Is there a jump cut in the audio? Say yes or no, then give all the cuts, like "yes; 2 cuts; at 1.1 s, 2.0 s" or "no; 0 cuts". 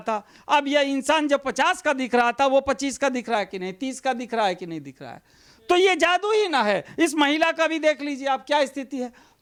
no; 0 cuts